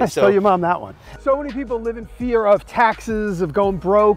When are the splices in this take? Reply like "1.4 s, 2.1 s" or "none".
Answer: none